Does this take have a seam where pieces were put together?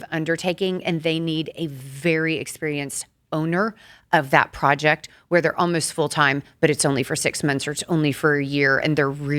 no; 0 cuts

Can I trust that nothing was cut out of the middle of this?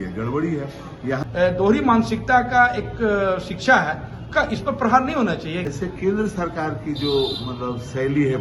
no; 2 cuts; at 1.2 s, 5.7 s

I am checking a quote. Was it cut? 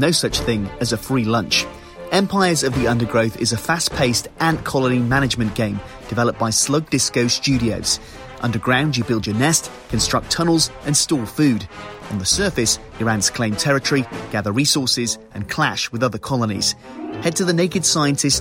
no; 0 cuts

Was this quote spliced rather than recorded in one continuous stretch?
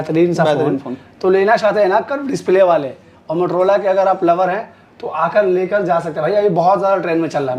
no; 0 cuts

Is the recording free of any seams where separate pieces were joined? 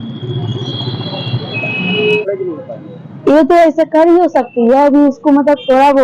no; 1 cut; at 2.3 s

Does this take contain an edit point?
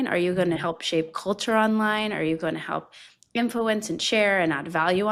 no; 0 cuts

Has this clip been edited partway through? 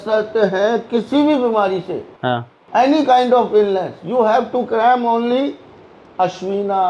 no; 0 cuts

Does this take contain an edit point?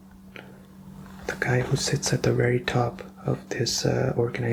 no; 0 cuts

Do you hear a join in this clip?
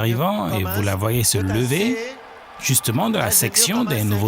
no; 0 cuts

